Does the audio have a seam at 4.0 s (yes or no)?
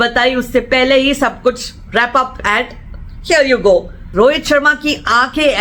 yes